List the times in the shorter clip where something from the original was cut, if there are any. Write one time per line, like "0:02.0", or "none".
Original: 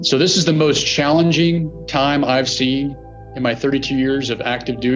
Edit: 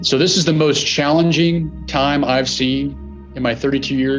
none